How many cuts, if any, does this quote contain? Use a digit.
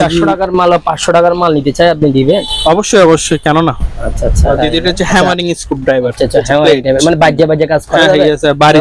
1